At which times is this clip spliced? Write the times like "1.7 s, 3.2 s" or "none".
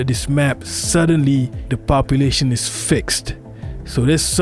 none